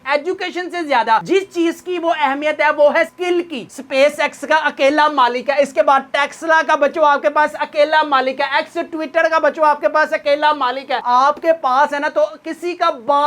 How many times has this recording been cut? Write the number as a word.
two